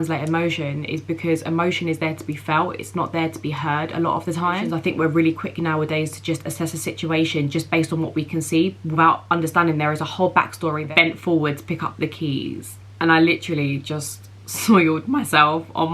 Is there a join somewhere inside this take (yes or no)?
yes